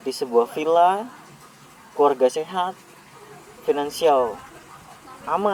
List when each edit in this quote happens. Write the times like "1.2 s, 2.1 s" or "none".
none